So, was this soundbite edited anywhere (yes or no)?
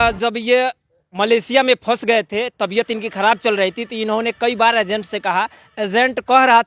no